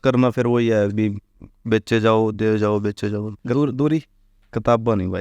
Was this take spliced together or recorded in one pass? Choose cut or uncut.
cut